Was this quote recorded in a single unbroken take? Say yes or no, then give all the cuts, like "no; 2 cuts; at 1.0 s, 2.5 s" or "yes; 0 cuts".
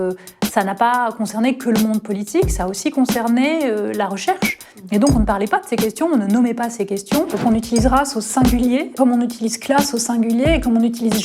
no; 2 cuts; at 7.3 s, 8.9 s